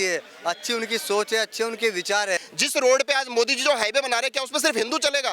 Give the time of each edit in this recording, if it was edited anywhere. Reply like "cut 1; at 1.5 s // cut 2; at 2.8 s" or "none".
cut 1; at 2.5 s